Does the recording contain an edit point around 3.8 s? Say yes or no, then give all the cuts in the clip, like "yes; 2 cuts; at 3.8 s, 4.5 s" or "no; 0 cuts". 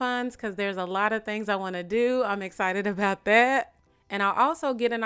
no; 0 cuts